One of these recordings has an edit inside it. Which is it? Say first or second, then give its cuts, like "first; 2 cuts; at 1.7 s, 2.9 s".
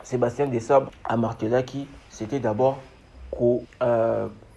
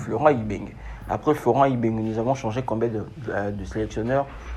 first; 2 cuts; at 1.0 s, 3.7 s